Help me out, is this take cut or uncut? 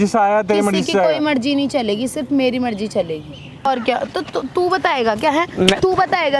cut